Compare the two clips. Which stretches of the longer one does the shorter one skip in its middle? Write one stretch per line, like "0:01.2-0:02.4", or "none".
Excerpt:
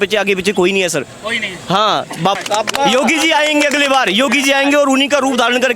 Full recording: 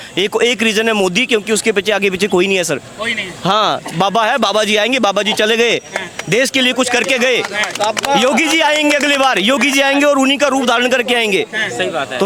0:04.1-0:07.7